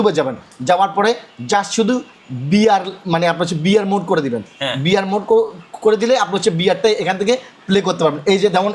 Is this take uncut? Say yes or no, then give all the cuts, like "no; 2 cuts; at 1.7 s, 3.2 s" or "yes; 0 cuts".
yes; 0 cuts